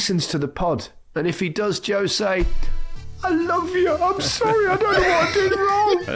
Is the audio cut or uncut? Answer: uncut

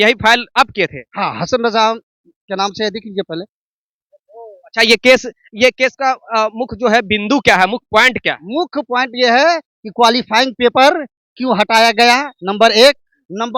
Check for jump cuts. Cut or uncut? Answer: uncut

